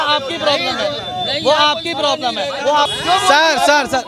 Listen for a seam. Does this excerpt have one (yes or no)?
yes